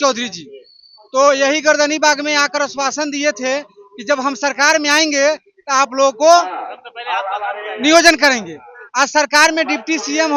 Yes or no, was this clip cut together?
no